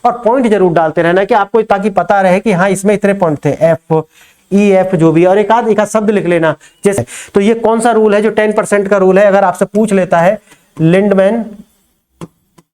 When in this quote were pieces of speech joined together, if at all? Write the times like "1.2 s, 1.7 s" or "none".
7.0 s